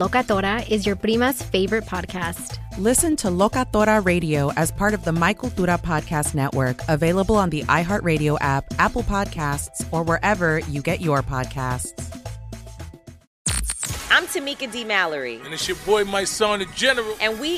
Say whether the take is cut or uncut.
cut